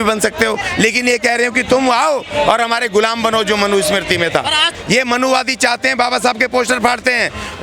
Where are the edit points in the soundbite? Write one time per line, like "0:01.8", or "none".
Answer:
0:04.7